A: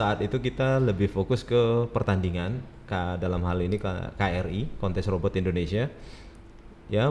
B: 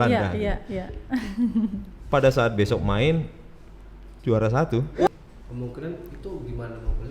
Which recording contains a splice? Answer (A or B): B